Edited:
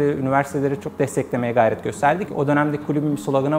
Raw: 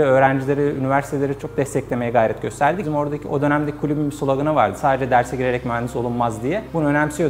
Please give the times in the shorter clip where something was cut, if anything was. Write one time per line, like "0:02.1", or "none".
0:02.3